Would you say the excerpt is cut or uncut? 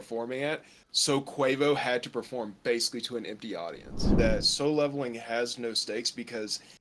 cut